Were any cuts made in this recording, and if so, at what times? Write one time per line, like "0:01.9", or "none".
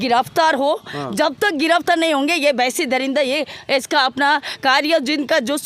none